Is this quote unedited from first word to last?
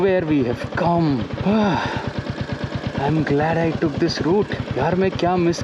no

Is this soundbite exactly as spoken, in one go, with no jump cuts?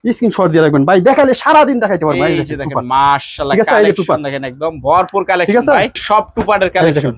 no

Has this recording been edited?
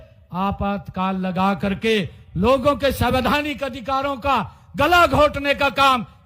no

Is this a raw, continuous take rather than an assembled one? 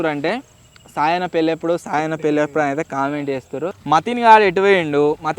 no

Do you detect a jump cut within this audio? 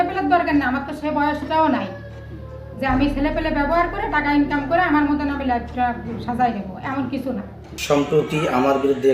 yes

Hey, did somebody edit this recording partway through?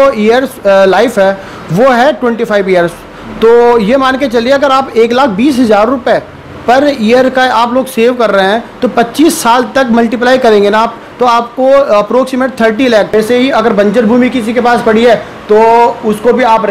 yes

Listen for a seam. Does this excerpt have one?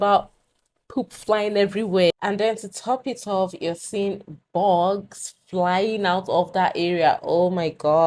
yes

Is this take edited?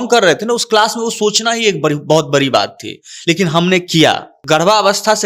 yes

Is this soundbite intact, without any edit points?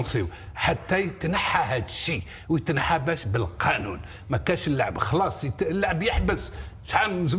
yes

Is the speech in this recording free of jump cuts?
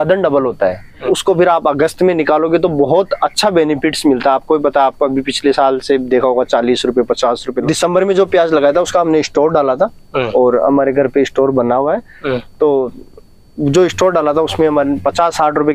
no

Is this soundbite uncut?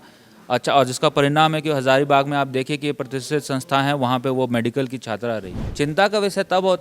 no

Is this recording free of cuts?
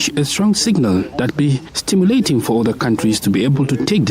no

